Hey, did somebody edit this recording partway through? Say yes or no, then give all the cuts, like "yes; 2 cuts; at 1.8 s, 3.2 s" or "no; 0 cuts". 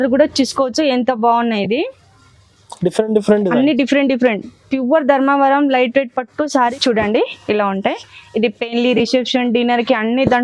yes; 1 cut; at 6.6 s